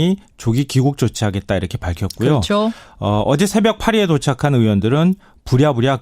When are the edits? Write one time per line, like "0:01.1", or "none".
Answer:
0:02.4